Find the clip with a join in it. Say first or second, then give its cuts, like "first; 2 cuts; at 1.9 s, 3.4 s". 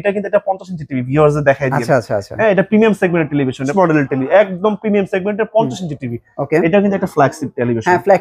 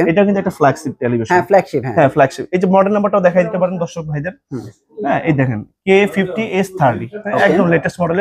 first; 1 cut; at 3.7 s